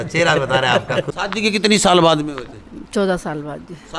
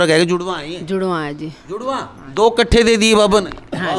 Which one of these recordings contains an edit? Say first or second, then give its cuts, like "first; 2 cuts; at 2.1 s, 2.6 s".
first; 1 cut; at 1.1 s